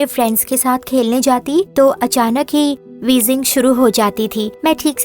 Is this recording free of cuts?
no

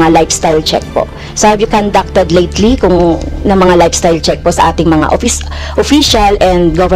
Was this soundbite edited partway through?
no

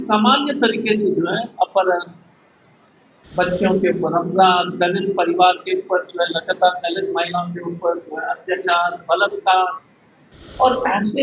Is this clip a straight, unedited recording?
yes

